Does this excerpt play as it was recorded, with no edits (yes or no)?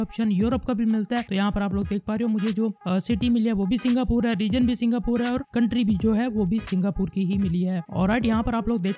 no